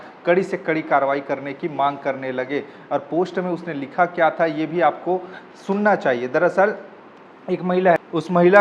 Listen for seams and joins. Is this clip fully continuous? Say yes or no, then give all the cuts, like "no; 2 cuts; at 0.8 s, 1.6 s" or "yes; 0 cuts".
yes; 0 cuts